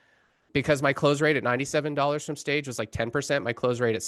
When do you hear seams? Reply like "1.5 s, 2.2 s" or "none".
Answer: none